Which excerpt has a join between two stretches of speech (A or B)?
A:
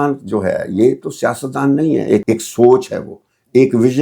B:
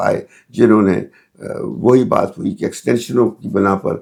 A